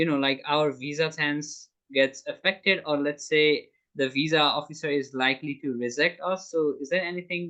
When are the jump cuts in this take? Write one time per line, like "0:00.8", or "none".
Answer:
none